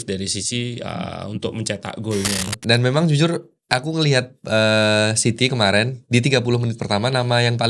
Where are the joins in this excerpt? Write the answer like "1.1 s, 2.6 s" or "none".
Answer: 2.5 s